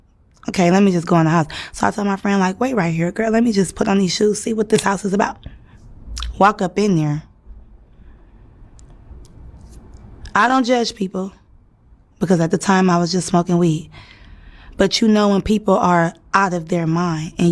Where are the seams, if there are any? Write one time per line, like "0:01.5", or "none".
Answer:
none